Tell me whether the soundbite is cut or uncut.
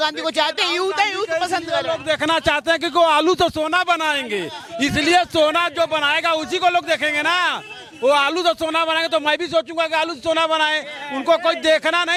uncut